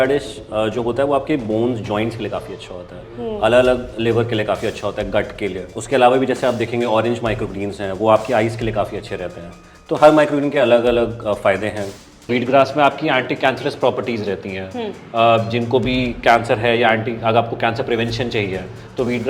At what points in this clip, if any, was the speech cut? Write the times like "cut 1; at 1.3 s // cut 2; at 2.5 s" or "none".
cut 1; at 12.1 s